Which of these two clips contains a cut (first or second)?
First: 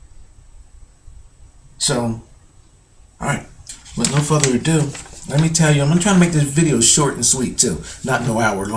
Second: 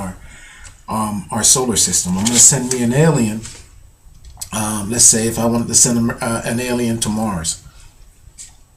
second